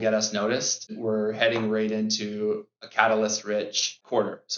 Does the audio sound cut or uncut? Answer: cut